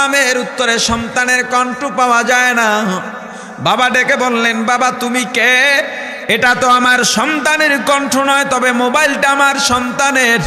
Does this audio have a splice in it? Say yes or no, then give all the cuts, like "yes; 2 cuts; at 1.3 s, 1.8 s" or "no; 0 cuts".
no; 0 cuts